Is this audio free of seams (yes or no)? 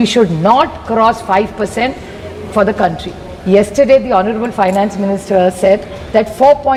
yes